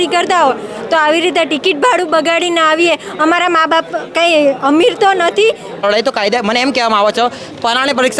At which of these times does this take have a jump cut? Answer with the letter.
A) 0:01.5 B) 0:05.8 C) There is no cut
B